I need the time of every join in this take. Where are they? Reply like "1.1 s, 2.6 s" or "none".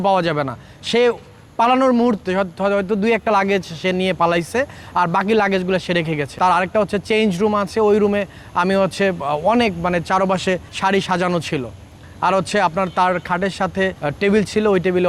6.3 s, 10.7 s, 14.0 s